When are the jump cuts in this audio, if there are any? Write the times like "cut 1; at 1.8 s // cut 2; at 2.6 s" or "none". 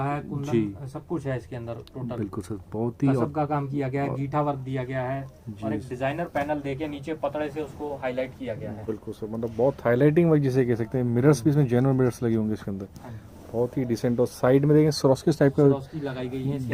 none